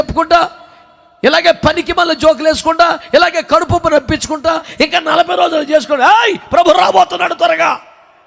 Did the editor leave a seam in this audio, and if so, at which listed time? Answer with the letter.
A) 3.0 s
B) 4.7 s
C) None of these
B